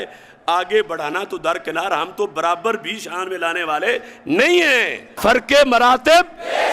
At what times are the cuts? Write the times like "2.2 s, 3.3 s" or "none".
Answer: 5.1 s